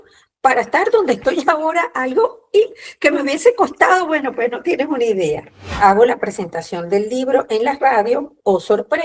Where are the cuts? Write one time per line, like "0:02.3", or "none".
0:05.7